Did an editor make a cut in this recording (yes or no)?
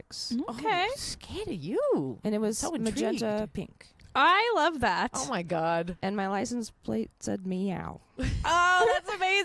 no